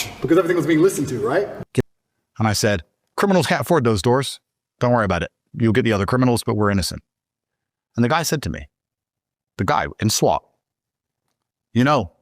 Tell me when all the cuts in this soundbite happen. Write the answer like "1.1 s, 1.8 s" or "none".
1.8 s